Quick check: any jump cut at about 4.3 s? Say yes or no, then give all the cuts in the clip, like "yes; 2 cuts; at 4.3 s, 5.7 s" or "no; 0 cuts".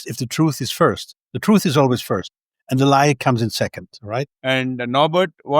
yes; 1 cut; at 4.3 s